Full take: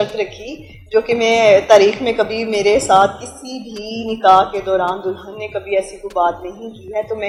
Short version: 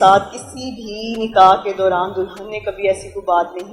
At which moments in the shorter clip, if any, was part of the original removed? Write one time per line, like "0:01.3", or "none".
none